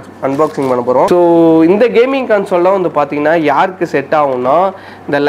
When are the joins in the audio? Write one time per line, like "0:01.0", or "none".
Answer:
0:01.2